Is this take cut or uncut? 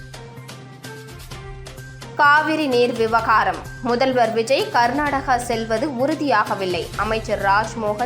cut